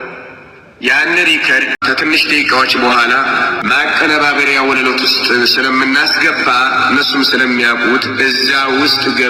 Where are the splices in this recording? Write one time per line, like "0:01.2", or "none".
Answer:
0:01.7
0:03.6